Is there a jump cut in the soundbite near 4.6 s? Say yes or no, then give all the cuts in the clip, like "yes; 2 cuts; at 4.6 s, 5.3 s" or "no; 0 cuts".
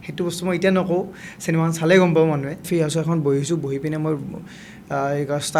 no; 1 cut; at 2.6 s